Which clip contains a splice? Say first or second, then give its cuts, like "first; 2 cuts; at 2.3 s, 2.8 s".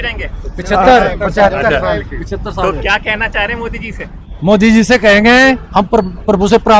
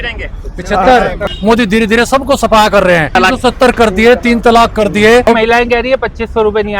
second; 3 cuts; at 1.3 s, 3.1 s, 5.2 s